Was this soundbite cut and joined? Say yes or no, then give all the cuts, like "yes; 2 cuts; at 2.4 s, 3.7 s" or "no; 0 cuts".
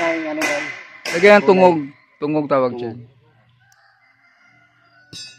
no; 0 cuts